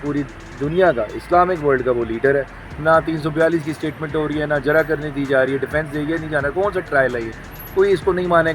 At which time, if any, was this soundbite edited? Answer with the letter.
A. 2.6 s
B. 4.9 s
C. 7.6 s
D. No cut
A